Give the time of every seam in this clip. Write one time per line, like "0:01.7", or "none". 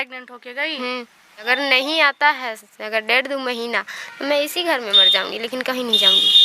0:01.5

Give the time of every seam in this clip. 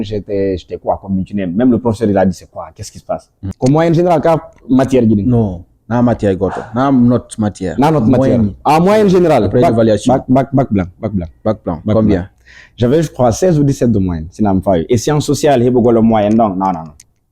0:03.5

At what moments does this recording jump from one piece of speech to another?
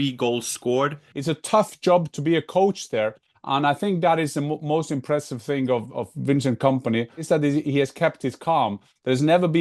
0:01.1
0:07.2

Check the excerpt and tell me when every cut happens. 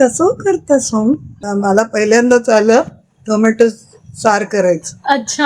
0:01.3

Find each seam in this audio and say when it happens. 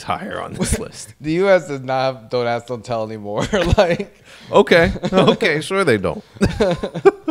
none

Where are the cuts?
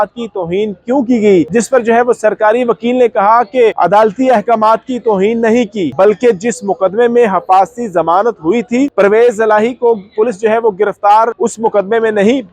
0:01.5
0:03.8
0:05.9
0:08.9
0:11.3

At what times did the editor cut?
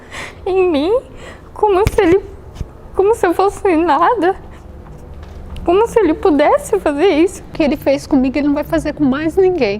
0:07.5

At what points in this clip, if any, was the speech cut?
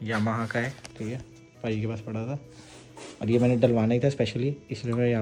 none

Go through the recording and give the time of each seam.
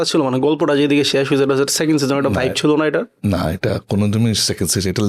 none

